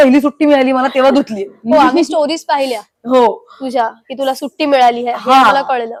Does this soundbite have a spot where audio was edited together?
no; 0 cuts

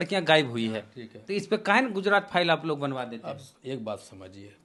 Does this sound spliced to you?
no; 0 cuts

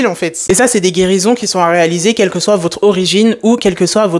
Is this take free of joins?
yes; 0 cuts

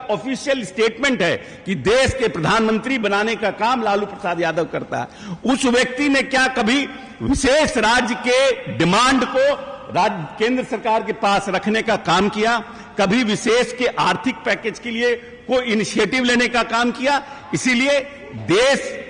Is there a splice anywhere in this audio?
no; 0 cuts

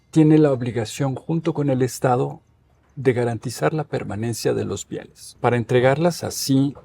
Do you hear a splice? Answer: yes; 1 cut; at 5.2 s

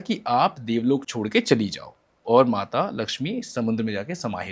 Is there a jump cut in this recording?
no; 0 cuts

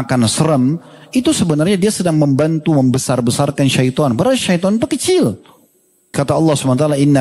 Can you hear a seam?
yes; 1 cut; at 6.1 s

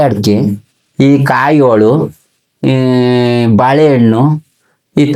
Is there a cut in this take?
no; 0 cuts

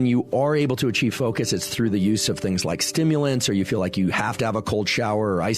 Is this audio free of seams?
yes; 0 cuts

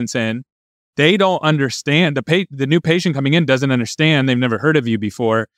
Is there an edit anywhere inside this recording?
no; 0 cuts

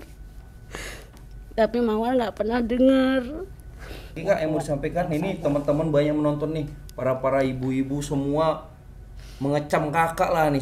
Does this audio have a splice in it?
yes; 1 cut; at 4.2 s

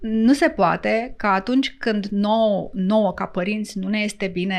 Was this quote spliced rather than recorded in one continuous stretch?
no; 0 cuts

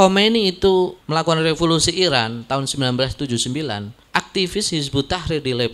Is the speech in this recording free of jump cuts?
no; 2 cuts; at 1.0 s, 3.9 s

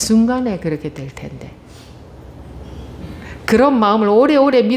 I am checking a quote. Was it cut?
no; 0 cuts

